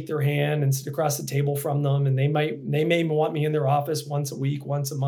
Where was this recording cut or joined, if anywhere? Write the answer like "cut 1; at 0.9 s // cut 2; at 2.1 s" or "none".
none